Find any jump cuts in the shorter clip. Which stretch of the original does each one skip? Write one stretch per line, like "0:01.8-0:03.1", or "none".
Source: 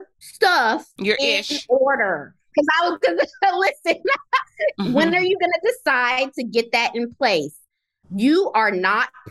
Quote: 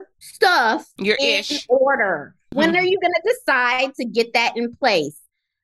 0:02.5-0:04.9